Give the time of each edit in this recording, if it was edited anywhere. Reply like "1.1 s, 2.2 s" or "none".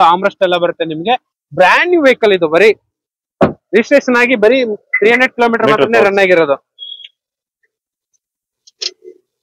none